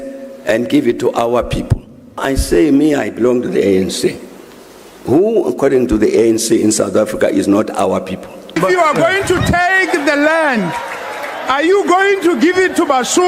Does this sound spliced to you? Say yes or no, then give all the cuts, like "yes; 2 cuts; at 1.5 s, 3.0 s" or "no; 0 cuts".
yes; 2 cuts; at 2.2 s, 8.6 s